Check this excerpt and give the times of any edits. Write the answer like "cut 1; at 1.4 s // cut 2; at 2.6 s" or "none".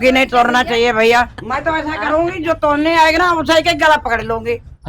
cut 1; at 1.4 s

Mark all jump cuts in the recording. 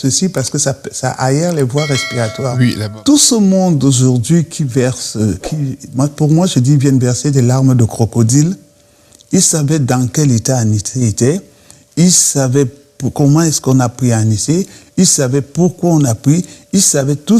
cut 1; at 2.8 s

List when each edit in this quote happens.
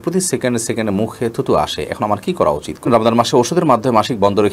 cut 1; at 2.9 s

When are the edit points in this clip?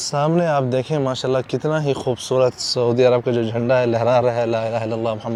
none

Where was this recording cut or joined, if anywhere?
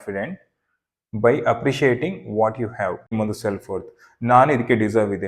cut 1; at 3.1 s

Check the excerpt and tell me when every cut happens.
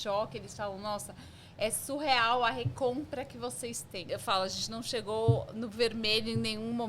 cut 1; at 4.0 s

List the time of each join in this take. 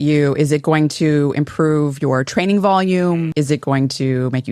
cut 1; at 3.3 s

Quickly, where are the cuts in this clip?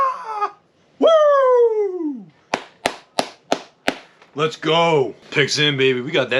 cut 1; at 5.2 s

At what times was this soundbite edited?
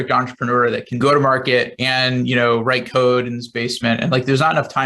cut 1; at 0.9 s

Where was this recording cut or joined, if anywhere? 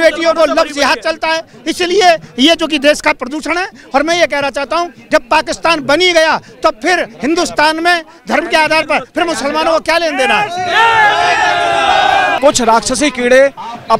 cut 1; at 12.4 s

